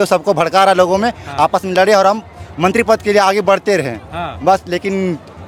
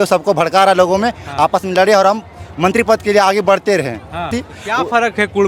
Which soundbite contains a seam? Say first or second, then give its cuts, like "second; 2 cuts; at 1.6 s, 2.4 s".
second; 1 cut; at 4.3 s